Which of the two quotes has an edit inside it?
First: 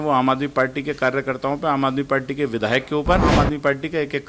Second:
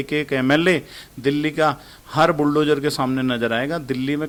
first; 1 cut; at 3.3 s

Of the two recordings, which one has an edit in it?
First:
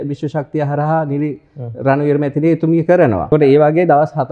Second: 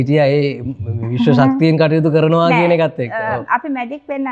first; 1 cut; at 3.3 s

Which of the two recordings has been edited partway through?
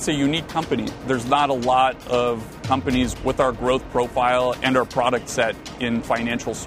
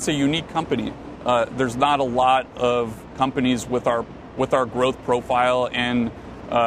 first; 3 cuts; at 1.0 s, 3.1 s, 4.6 s

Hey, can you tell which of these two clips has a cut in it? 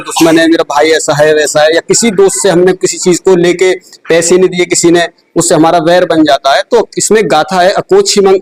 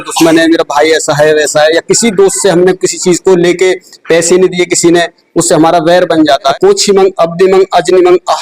second; 1 cut; at 6.5 s

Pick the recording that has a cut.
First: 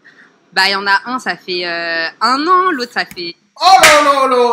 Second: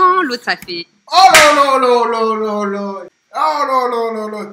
second; 1 cut; at 3.2 s

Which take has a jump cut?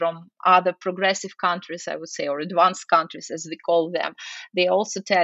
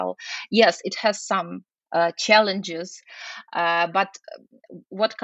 second; 1 cut; at 1.7 s

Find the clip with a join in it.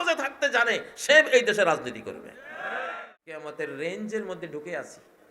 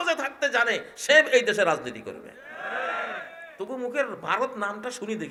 first; 1 cut; at 3.4 s

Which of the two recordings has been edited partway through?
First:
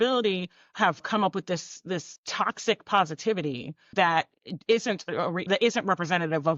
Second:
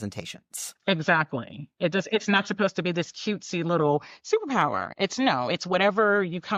first; 4 cuts; at 1.1 s, 2.2 s, 3.9 s, 5.5 s

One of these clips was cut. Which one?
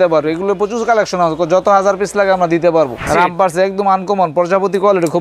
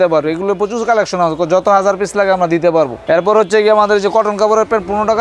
first; 1 cut; at 3.0 s

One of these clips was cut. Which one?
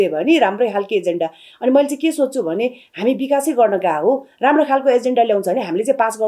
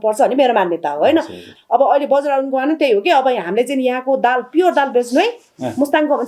second; 1 cut; at 1.5 s

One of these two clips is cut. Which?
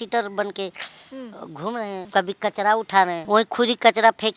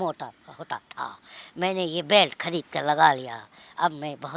first; 2 cuts; at 2.1 s, 3.2 s

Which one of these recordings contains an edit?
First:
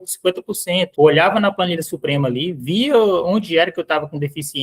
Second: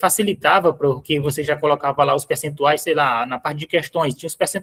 first; 1 cut; at 0.9 s

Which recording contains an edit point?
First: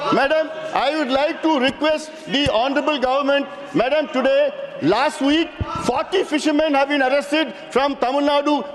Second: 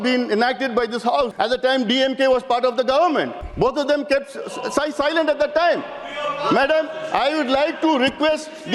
second; 2 cuts; at 1.3 s, 3.4 s

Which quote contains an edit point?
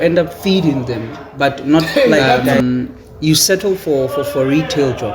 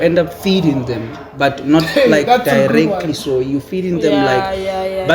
first; 1 cut; at 2.5 s

